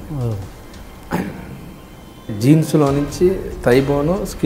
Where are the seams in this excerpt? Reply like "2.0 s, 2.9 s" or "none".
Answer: 2.3 s